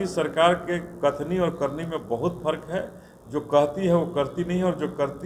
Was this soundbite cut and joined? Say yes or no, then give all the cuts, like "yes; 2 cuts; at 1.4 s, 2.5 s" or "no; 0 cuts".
no; 0 cuts